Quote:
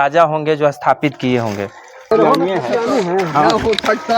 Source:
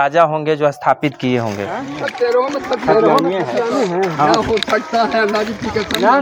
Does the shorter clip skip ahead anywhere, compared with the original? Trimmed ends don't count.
yes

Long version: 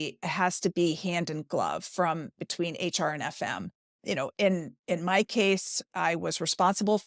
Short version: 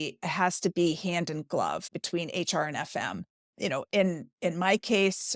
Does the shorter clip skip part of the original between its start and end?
yes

